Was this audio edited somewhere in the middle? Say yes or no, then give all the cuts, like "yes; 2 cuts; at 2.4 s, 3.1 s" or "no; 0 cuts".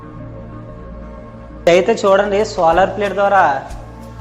yes; 1 cut; at 1.7 s